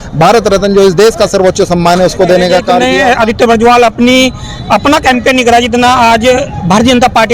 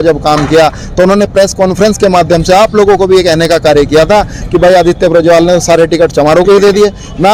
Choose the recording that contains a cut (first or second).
first